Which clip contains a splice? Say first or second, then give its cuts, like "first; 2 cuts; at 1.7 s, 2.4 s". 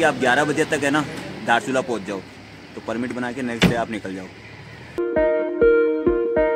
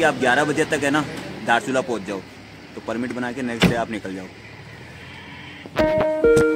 first; 1 cut; at 5.0 s